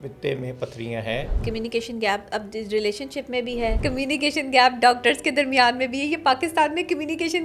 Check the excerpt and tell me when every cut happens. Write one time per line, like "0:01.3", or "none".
0:01.3
0:03.8